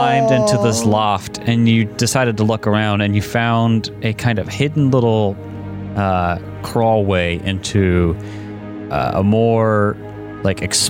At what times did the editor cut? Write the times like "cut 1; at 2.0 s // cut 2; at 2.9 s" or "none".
none